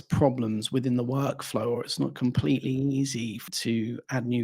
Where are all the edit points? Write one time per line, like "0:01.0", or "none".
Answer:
0:03.4